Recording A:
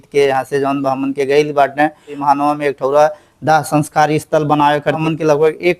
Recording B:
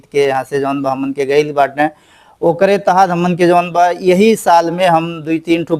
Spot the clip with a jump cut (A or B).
A